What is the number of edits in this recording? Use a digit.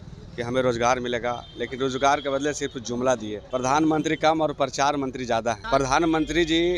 2